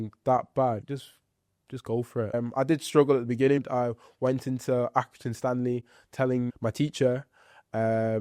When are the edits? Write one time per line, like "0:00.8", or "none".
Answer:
0:00.8
0:02.3
0:03.6
0:06.5